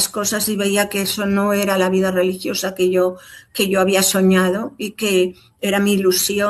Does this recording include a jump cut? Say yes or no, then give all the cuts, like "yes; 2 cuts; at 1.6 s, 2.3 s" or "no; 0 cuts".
no; 0 cuts